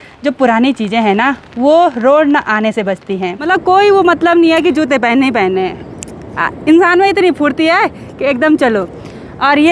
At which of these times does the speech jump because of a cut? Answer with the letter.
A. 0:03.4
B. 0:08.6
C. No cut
A